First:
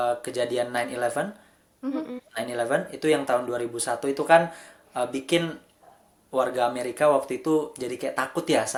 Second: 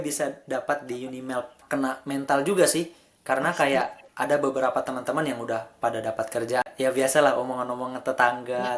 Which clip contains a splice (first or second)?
second